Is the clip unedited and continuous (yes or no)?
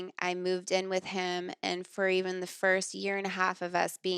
yes